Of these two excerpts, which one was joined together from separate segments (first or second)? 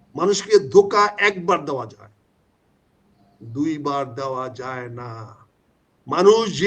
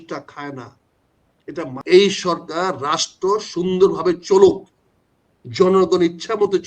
second